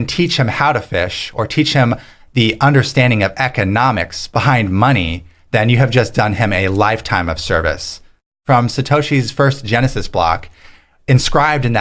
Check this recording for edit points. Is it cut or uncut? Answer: cut